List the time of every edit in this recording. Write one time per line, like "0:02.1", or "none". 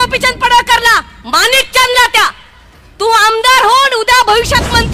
none